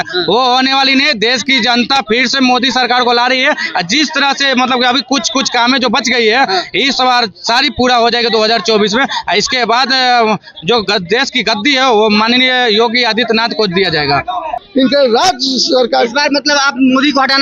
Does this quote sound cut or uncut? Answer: cut